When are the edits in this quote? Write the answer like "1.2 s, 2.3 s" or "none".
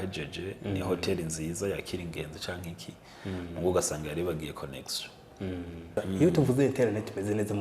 5.9 s